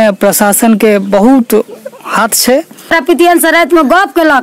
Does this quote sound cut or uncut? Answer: cut